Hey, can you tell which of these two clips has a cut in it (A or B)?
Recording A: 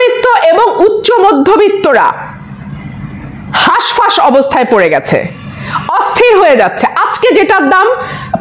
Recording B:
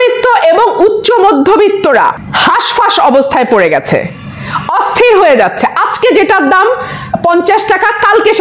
B